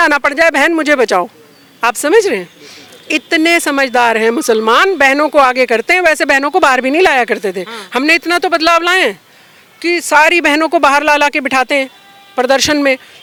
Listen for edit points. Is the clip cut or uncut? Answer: uncut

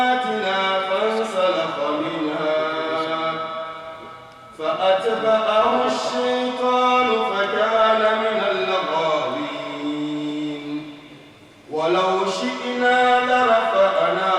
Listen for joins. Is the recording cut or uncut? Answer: uncut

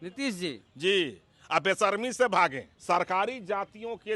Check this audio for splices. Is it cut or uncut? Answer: cut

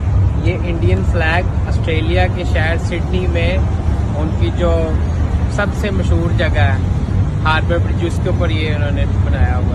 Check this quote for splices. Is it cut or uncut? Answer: uncut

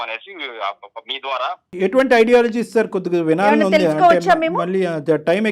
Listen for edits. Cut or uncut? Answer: cut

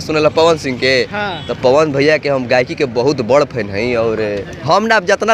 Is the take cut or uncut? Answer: uncut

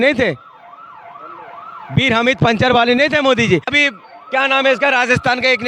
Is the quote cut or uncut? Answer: cut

